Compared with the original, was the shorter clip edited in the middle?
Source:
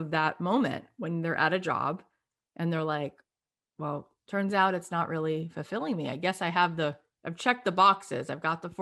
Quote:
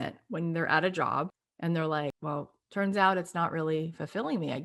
yes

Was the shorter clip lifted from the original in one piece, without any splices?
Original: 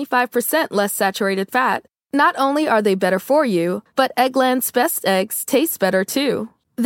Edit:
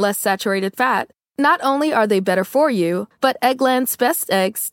yes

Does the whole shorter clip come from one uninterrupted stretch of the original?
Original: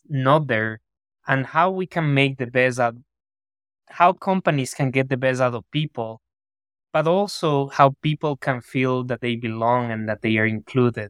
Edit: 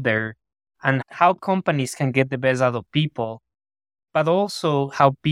no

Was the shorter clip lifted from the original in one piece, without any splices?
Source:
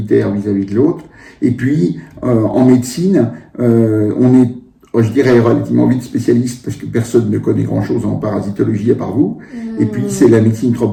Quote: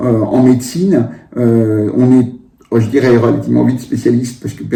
yes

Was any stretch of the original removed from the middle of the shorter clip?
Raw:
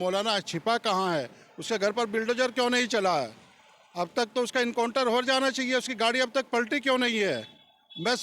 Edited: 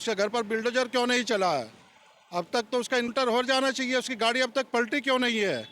yes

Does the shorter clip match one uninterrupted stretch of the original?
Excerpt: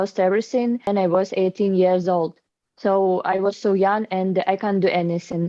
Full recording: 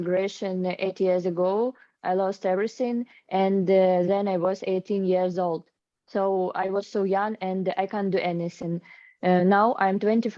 no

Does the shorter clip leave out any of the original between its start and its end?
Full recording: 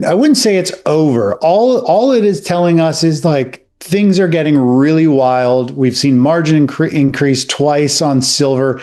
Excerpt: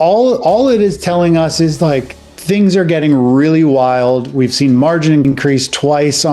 yes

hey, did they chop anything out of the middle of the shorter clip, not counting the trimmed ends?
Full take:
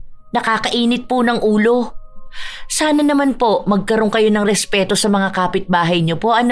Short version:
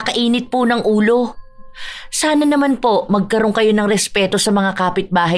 no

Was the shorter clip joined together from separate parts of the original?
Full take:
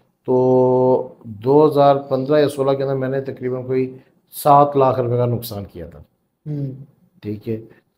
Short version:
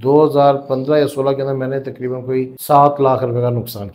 yes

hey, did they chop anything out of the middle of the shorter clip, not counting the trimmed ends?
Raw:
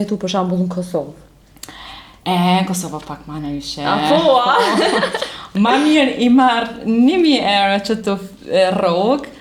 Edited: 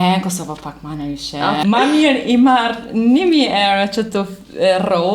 yes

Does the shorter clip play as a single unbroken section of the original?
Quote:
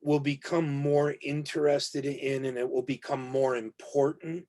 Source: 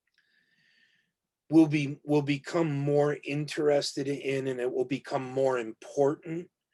yes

